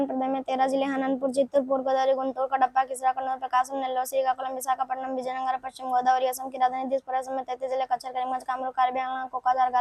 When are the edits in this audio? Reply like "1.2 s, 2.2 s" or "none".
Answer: none